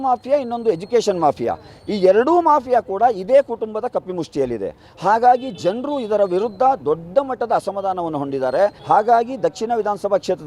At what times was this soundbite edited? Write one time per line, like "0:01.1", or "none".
0:08.8